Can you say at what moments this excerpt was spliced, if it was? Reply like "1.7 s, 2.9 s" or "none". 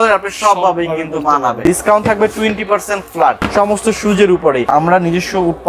1.6 s, 3.4 s, 4.6 s